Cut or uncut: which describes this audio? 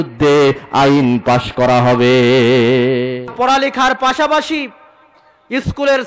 cut